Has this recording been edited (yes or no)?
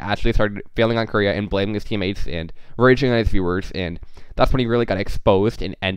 no